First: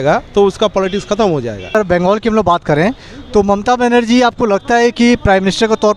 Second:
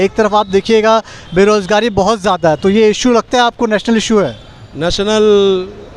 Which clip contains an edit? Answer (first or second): first